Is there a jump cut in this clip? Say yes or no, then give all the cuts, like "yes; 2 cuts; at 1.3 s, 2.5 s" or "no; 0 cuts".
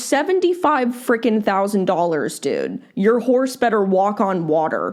no; 0 cuts